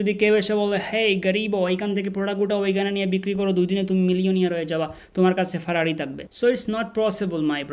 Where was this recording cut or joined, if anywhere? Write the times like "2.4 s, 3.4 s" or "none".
none